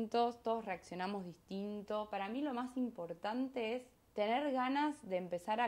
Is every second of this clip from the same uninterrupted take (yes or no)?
no